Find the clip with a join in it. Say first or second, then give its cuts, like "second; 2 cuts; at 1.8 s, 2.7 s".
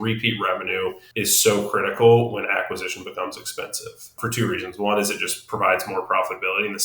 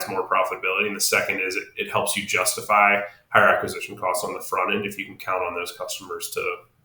first; 2 cuts; at 1.0 s, 4.2 s